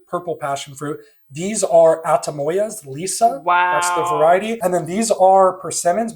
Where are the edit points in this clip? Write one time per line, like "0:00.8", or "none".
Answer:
0:04.5